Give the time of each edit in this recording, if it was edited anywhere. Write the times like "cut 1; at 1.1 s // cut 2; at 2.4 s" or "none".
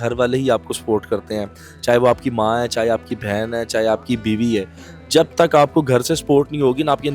none